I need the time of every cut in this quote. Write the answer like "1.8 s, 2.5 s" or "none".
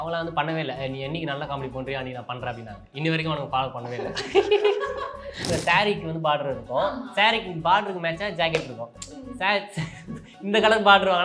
5.5 s